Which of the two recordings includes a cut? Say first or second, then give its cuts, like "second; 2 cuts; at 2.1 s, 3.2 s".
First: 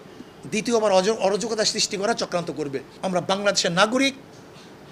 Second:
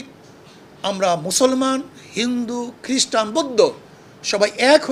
first; 1 cut; at 2.9 s